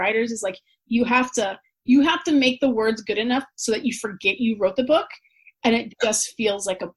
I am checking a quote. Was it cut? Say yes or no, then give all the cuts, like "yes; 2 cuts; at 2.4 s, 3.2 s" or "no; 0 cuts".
no; 0 cuts